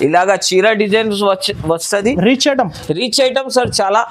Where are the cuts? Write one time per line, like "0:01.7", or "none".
none